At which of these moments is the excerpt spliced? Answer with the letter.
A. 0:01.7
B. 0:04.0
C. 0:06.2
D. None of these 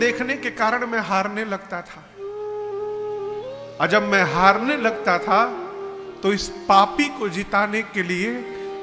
D